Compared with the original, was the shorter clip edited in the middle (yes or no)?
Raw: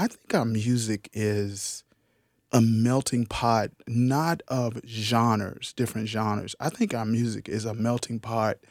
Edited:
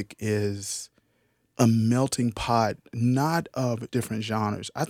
yes